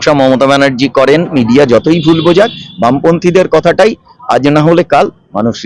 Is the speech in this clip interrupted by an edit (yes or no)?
yes